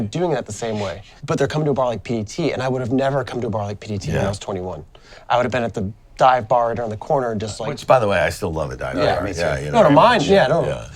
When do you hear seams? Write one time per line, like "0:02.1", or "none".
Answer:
none